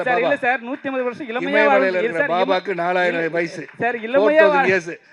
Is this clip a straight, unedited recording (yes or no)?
yes